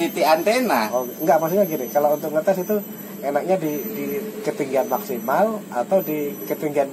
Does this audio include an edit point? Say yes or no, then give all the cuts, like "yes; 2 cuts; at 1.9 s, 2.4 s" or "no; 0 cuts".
no; 0 cuts